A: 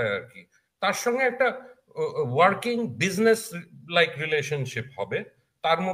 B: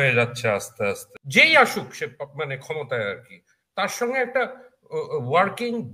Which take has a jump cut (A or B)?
B